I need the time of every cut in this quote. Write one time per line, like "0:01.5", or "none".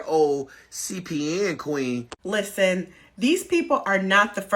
0:02.1